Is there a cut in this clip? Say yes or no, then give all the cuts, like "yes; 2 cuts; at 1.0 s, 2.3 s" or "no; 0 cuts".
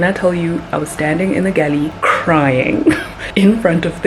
yes; 2 cuts; at 2.0 s, 3.1 s